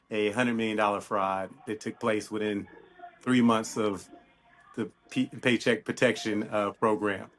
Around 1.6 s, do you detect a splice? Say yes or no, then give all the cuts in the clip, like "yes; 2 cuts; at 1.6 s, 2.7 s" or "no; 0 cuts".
no; 0 cuts